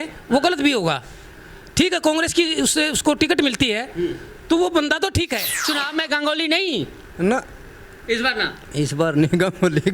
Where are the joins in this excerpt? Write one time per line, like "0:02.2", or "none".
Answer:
0:05.6